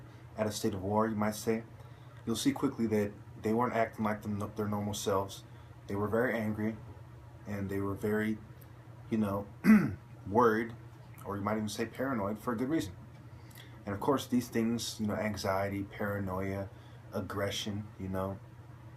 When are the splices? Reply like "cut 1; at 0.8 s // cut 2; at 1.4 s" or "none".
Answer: cut 1; at 16.9 s